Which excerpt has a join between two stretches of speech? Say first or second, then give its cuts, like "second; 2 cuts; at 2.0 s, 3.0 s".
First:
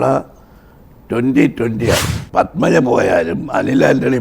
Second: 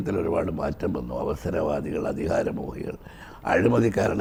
first; 1 cut; at 2.1 s